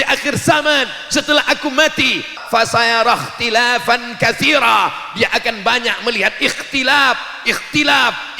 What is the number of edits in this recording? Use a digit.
1